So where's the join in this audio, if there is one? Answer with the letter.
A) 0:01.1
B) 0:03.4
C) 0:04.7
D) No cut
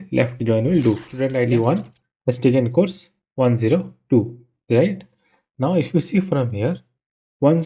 A